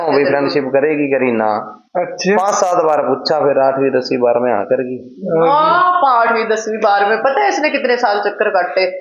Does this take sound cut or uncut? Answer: uncut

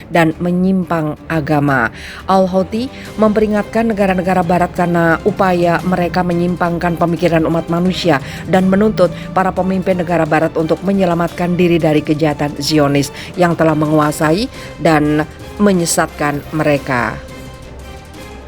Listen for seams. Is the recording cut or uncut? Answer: cut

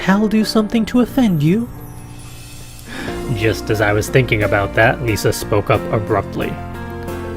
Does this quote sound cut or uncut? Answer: cut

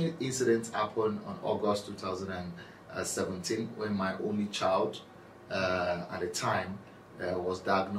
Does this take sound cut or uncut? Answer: uncut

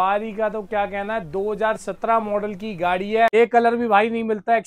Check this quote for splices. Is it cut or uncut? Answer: cut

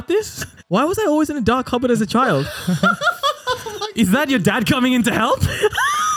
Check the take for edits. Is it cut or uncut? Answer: uncut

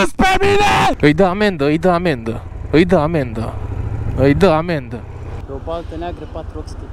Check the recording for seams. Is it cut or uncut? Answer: cut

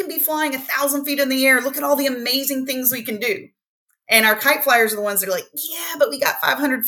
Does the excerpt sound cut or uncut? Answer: uncut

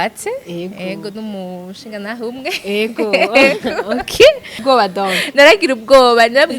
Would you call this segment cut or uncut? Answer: cut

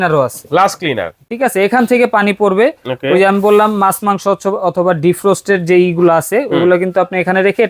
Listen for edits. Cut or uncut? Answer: cut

